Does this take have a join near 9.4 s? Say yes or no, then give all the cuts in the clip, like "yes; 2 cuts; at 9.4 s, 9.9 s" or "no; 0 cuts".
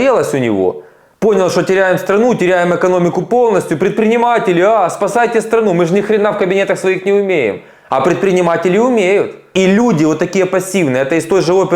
yes; 1 cut; at 9.4 s